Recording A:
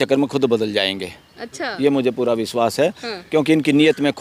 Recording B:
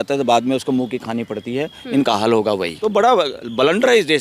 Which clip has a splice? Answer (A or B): B